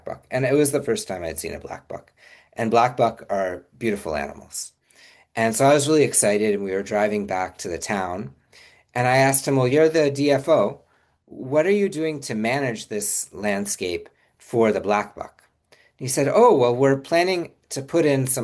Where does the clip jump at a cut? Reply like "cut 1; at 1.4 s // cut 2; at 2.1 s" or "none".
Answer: none